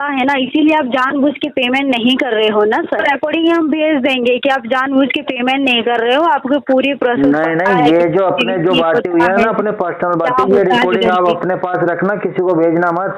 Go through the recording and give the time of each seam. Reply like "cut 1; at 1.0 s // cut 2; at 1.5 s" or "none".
cut 1; at 3.0 s